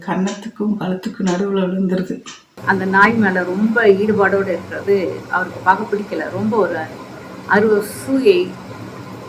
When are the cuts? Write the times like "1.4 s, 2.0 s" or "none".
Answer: 2.6 s